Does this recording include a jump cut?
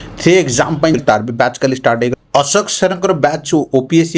yes; 1 cut; at 1.0 s

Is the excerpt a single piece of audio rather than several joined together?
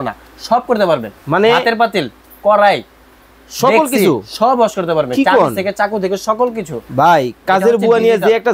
yes; 0 cuts

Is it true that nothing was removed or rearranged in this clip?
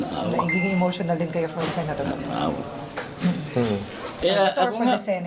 no; 1 cut; at 4.2 s

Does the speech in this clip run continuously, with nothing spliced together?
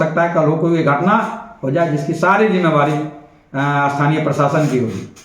yes; 0 cuts

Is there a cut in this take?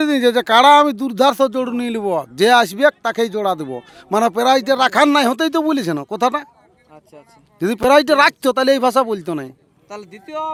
no; 0 cuts

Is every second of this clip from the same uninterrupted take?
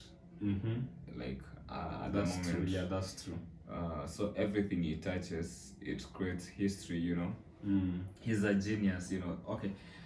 yes; 0 cuts

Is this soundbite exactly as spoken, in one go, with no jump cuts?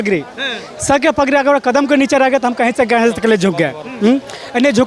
yes; 0 cuts

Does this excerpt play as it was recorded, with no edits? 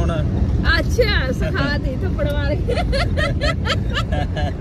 yes; 0 cuts

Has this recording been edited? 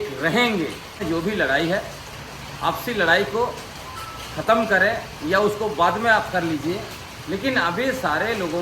yes; 1 cut; at 1.0 s

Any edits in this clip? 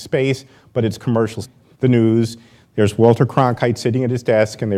no; 0 cuts

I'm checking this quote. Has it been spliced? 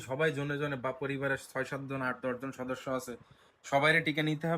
no; 0 cuts

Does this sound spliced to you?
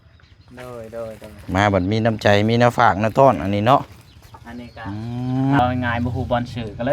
yes; 1 cut; at 5.6 s

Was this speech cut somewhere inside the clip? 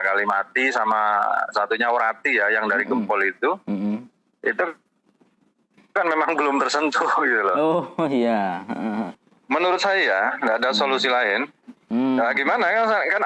yes; 1 cut; at 9.2 s

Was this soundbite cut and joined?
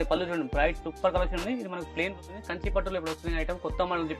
yes; 1 cut; at 2.1 s

